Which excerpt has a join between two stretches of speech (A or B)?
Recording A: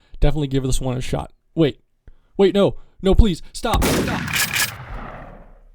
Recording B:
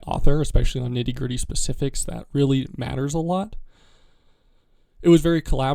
A